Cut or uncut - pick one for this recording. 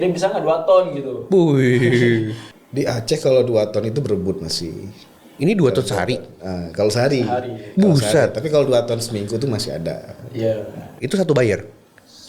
cut